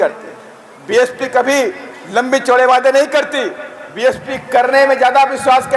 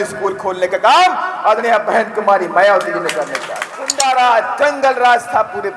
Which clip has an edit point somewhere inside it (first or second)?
second